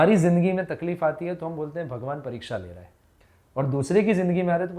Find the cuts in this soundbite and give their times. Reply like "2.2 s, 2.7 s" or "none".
none